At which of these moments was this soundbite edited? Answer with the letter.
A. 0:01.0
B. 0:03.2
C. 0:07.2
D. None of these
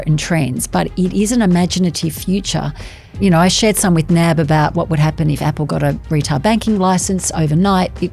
B